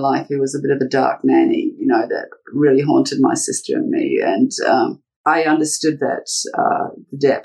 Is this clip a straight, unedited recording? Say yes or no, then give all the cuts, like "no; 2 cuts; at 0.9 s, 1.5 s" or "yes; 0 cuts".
no; 1 cut; at 5.1 s